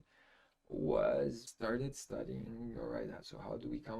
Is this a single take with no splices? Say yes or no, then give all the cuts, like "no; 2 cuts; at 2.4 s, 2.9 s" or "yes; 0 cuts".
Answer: no; 1 cut; at 1.5 s